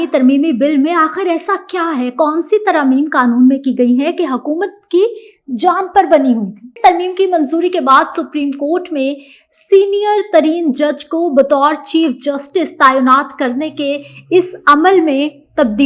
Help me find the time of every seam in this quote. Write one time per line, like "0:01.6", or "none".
0:06.7